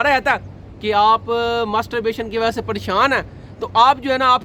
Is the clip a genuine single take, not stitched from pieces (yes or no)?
yes